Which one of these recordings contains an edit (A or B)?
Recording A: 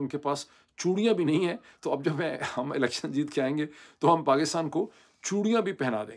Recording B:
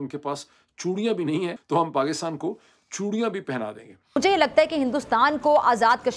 B